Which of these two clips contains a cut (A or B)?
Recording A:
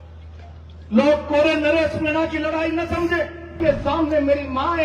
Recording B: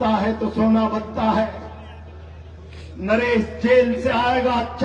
A